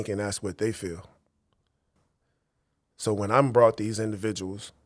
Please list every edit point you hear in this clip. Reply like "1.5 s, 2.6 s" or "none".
2.0 s